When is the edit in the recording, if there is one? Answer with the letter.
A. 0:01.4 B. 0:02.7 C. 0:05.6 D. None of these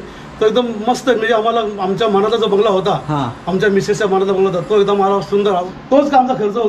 C